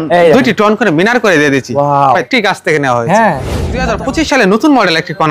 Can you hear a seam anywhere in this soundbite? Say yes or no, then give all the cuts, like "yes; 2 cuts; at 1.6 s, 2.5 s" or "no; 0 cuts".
yes; 2 cuts; at 2.1 s, 3.8 s